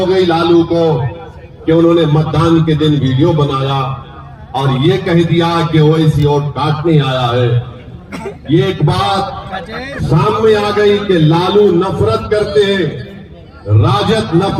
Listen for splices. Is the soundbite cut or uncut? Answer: uncut